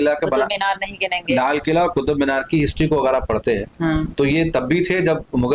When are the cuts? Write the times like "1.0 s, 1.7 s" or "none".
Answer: none